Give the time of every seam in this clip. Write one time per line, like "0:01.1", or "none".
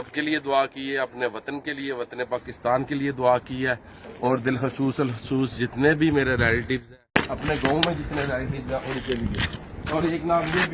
0:07.1